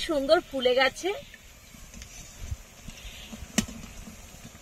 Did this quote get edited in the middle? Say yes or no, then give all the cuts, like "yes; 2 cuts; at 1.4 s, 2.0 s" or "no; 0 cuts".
no; 0 cuts